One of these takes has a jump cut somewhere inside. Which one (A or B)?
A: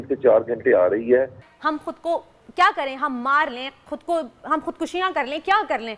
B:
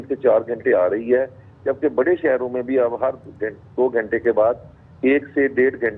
A